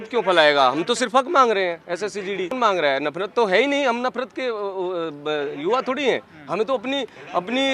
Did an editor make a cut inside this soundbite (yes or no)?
no